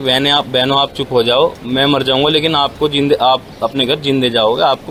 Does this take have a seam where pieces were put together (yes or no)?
no